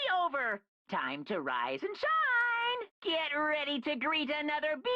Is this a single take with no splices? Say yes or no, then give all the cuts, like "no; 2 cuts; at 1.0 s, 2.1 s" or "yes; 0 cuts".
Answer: no; 1 cut; at 2.9 s